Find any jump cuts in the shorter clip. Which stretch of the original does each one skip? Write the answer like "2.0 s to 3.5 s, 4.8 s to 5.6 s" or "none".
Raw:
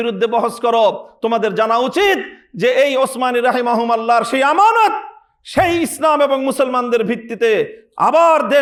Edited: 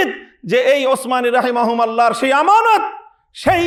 none